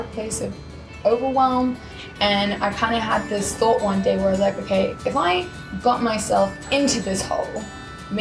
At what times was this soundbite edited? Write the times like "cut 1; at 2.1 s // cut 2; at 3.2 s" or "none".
cut 1; at 1.9 s // cut 2; at 5.0 s